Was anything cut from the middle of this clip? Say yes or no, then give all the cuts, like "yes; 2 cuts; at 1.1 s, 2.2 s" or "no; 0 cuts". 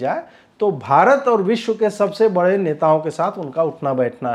no; 0 cuts